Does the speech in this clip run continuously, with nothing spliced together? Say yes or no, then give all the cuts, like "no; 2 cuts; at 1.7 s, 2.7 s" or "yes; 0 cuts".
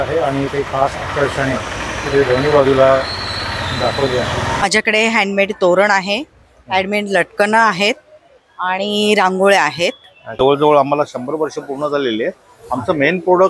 no; 2 cuts; at 4.6 s, 10.3 s